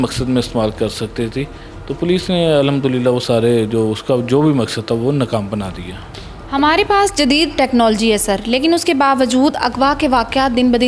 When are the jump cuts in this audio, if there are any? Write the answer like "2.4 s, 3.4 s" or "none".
none